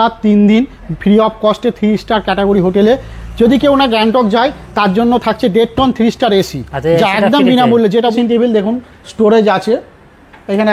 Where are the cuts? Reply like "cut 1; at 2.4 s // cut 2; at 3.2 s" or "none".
cut 1; at 8.1 s